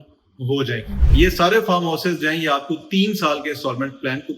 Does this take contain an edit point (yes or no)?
yes